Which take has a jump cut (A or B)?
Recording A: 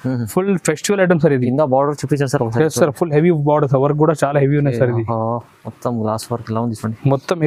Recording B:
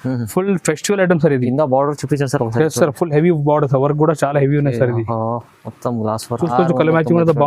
B